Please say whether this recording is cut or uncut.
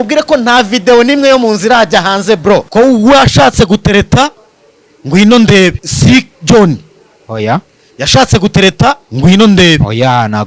cut